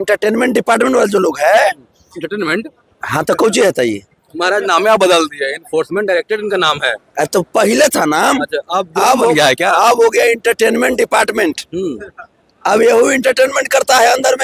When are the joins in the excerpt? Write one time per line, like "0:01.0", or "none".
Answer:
none